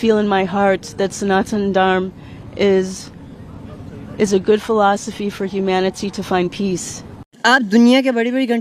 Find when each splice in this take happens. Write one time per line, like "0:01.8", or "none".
0:07.5